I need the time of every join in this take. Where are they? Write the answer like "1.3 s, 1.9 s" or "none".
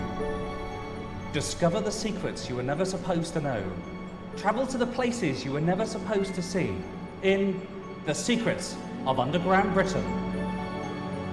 none